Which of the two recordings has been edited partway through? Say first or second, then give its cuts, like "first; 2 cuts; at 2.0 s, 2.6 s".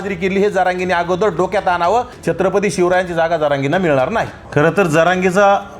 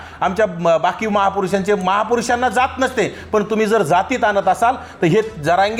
first; 2 cuts; at 2.1 s, 4.4 s